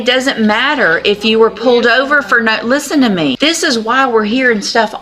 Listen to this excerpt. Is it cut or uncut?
cut